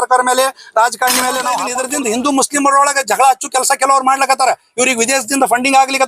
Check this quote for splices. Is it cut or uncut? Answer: cut